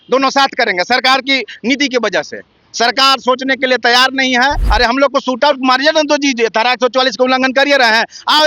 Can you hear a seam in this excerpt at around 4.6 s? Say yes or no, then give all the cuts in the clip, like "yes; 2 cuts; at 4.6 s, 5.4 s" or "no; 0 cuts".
yes; 1 cut; at 4.6 s